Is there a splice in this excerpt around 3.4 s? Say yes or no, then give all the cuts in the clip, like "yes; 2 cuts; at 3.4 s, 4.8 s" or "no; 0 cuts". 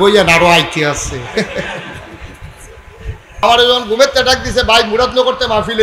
yes; 1 cut; at 3.4 s